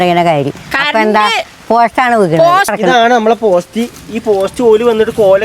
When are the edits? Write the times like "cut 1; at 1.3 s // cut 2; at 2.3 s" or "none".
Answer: cut 1; at 2.7 s